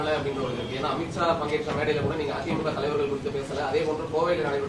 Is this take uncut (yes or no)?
yes